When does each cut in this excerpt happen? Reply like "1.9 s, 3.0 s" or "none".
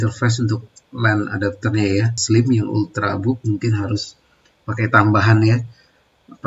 2.2 s